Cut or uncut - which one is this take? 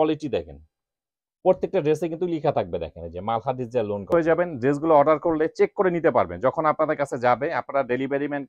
cut